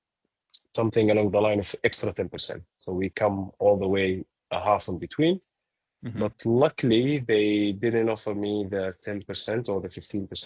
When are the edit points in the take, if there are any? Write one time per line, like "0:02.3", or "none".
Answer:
none